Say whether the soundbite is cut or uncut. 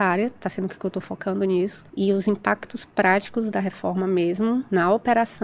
cut